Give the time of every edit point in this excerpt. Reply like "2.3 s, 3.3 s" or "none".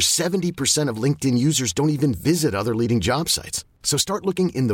none

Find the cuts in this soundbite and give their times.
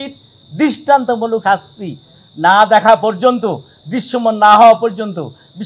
1.4 s

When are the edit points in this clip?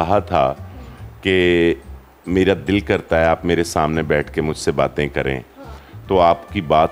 none

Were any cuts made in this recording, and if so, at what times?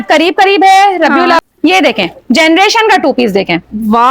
1.4 s

